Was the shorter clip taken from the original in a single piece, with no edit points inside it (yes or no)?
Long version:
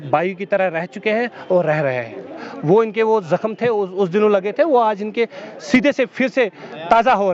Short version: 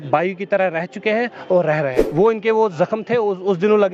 no